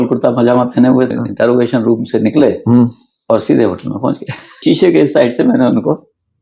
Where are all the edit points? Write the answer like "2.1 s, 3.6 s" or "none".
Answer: 1.1 s, 4.6 s